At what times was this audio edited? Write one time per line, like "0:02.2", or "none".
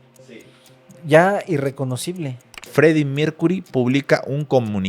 0:02.7